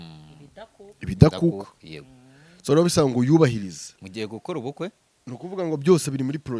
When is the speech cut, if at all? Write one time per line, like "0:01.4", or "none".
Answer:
none